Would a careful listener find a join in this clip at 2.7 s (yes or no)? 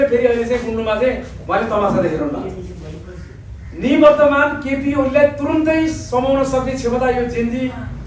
no